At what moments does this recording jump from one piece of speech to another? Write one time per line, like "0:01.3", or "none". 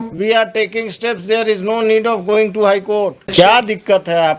0:03.3